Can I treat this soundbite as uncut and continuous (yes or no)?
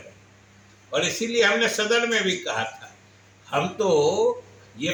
yes